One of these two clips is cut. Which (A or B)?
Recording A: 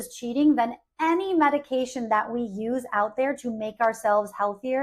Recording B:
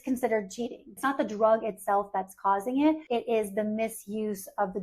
B